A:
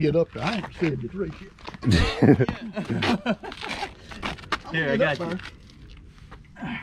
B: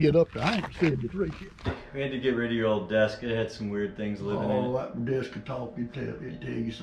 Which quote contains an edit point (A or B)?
B